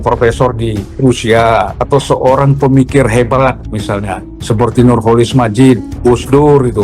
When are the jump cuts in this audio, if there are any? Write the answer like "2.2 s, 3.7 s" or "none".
0.9 s, 1.8 s, 3.7 s, 5.9 s

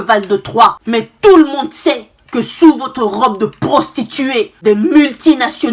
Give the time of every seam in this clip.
0.8 s, 4.5 s

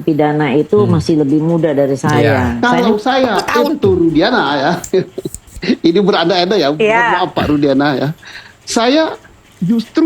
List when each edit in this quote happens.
2.5 s

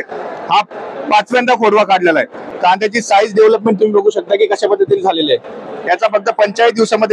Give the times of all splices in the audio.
2.4 s

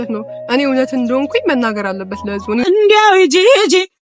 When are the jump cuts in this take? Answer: 2.6 s

